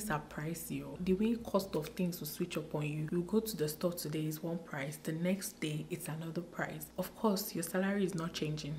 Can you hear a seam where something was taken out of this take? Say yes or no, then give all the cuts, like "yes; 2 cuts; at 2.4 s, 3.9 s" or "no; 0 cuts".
yes; 3 cuts; at 0.9 s, 3.0 s, 6.8 s